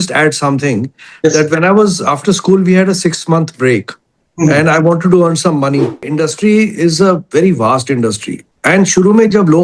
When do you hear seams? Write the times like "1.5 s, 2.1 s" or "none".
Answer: 6.1 s